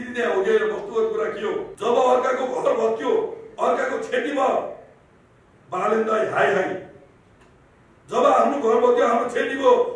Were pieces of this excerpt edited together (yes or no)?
yes